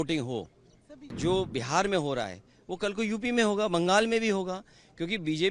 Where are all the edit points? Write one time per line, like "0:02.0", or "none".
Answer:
0:01.1